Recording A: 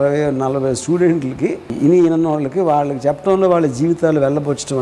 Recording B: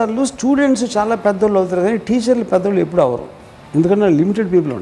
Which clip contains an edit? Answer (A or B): A